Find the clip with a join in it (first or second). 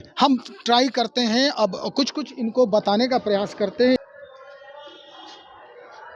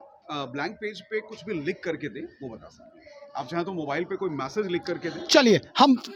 first